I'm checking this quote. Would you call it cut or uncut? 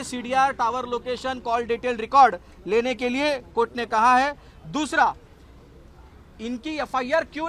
uncut